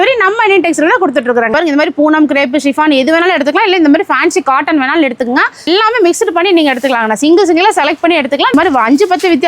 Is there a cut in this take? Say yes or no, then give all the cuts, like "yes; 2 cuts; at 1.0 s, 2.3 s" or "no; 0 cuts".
yes; 3 cuts; at 1.5 s, 5.7 s, 8.5 s